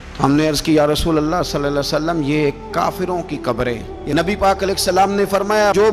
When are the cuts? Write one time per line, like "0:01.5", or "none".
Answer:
0:03.9